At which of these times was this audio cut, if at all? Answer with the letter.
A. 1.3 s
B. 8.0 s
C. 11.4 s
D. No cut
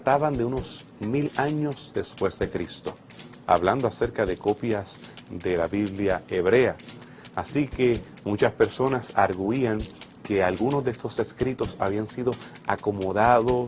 A